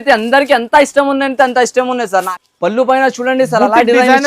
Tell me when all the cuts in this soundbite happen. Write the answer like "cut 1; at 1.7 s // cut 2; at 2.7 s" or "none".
cut 1; at 2.3 s